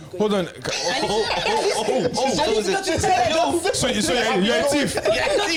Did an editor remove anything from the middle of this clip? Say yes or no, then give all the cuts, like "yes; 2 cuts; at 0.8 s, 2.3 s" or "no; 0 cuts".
no; 0 cuts